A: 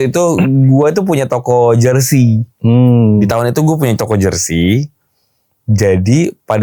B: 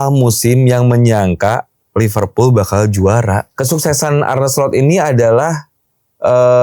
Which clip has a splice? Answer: B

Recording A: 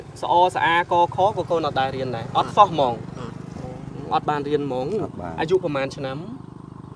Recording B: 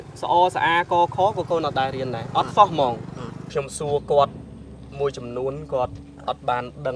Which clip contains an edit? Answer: B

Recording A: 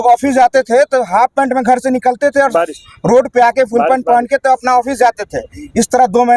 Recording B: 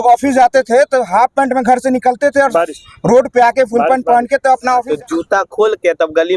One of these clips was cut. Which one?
B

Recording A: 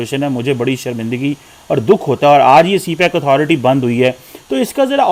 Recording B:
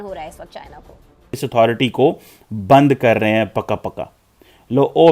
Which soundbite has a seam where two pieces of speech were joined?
B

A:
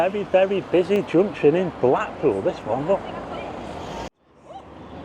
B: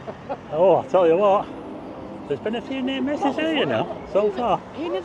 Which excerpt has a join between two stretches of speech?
A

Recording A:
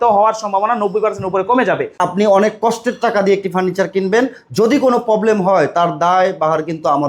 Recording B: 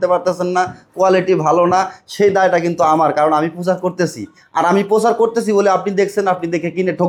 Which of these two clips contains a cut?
A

